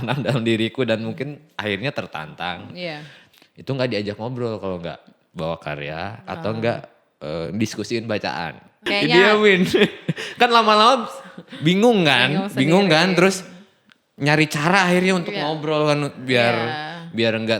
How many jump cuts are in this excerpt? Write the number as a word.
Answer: two